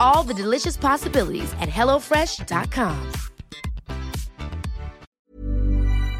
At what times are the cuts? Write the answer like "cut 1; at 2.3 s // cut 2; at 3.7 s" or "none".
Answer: cut 1; at 5.0 s